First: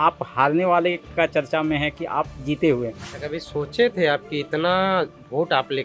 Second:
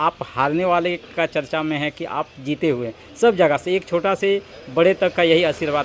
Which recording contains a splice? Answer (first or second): first